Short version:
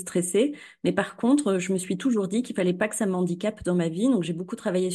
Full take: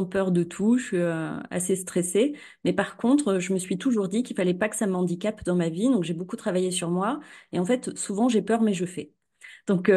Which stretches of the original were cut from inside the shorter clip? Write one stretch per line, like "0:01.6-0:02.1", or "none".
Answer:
none